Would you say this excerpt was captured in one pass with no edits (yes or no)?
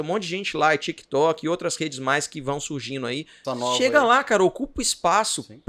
no